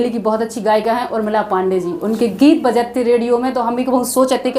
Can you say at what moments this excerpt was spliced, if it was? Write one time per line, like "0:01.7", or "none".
none